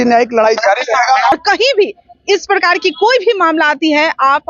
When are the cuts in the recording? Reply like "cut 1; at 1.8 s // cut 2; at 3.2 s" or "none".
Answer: cut 1; at 1.4 s